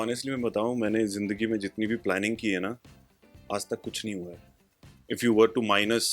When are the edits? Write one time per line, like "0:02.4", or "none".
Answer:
0:04.9